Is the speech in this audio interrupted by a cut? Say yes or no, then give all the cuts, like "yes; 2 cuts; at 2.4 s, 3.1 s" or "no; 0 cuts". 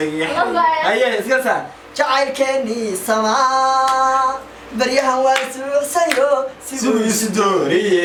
no; 0 cuts